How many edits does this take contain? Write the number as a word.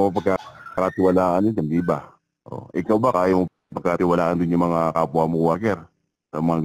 zero